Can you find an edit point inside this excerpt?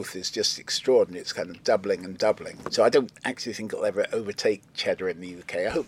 yes; 1 cut; at 2.6 s

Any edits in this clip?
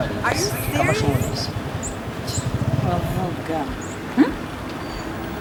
no; 0 cuts

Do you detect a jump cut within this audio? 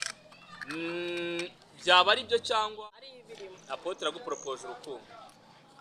yes; 1 cut; at 2.7 s

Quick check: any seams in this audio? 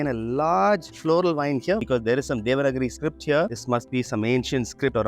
yes; 1 cut; at 1.8 s

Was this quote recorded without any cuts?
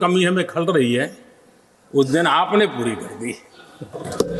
yes; 0 cuts

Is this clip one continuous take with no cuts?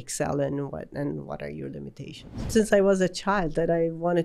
no; 1 cut; at 2.5 s

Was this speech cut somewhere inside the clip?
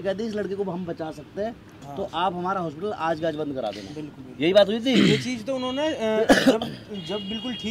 no; 0 cuts

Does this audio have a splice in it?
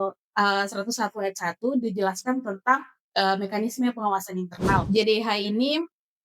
yes; 1 cut; at 4.8 s

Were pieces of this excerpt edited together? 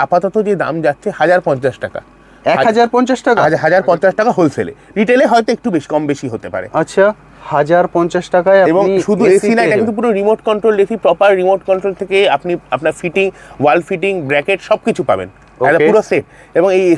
no; 0 cuts

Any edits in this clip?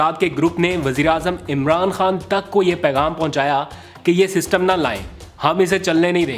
no; 0 cuts

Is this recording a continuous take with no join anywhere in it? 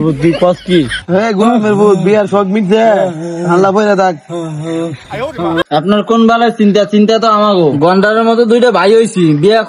no; 2 cuts; at 1.0 s, 5.6 s

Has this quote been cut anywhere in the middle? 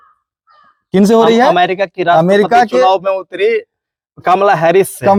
no; 0 cuts

